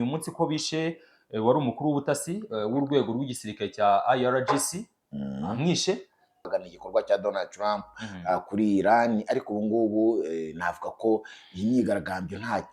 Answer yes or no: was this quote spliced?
yes